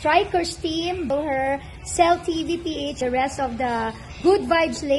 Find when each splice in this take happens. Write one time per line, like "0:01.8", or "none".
0:01.1
0:03.0